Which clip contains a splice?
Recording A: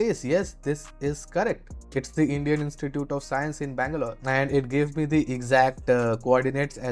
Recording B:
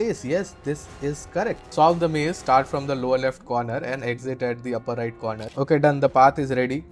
B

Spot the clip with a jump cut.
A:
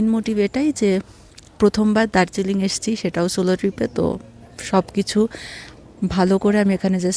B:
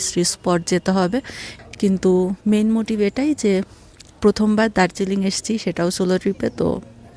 B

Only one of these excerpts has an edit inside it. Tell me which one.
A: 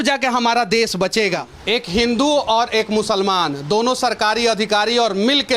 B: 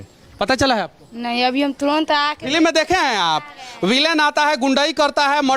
A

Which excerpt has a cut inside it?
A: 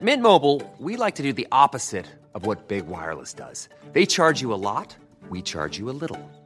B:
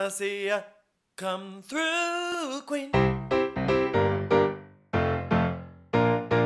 B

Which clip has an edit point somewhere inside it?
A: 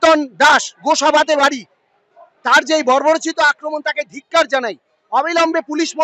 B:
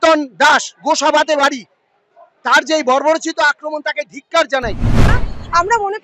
B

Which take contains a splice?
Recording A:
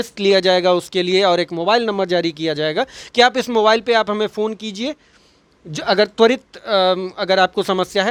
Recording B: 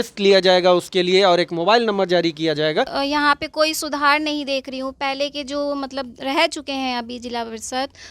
B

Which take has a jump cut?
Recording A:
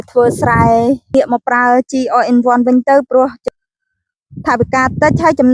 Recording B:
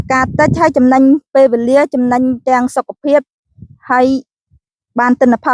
A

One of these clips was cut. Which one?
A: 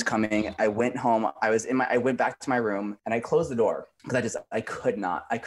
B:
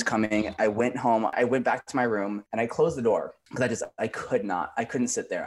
B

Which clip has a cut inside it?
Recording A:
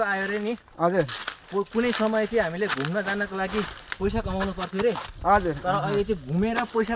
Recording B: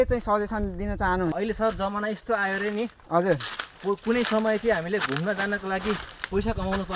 B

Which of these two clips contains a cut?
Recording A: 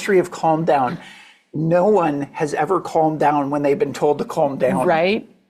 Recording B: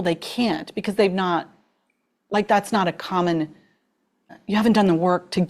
B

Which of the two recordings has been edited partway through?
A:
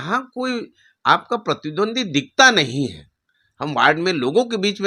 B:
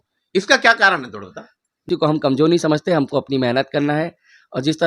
B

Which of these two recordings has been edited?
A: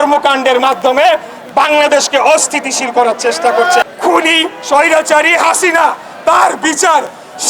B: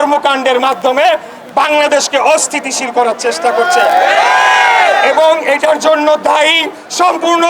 A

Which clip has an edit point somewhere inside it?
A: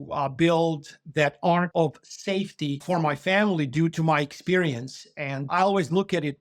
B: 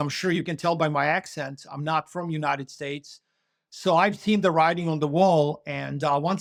A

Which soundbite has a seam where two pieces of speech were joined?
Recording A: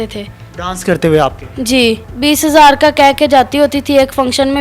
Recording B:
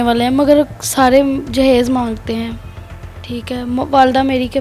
A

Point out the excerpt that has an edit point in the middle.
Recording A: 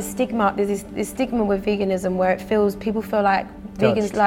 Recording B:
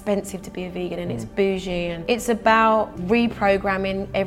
B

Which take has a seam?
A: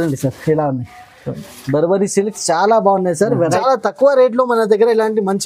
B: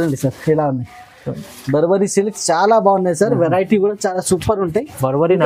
A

